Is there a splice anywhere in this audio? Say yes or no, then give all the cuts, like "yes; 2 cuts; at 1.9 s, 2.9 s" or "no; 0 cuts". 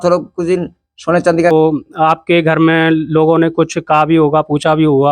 yes; 1 cut; at 1.5 s